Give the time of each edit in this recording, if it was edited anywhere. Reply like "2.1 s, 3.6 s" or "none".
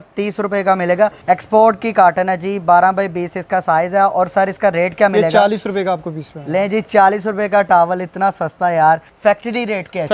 1.2 s, 9.1 s